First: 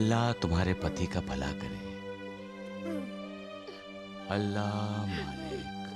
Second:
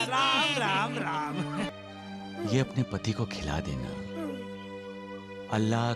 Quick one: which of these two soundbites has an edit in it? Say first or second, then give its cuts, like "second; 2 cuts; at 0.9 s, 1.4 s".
second; 1 cut; at 1.7 s